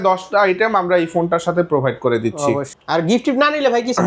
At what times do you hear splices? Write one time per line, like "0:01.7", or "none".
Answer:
0:02.7